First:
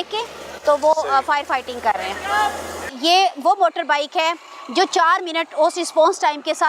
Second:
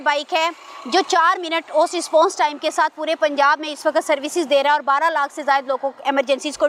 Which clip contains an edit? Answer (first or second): first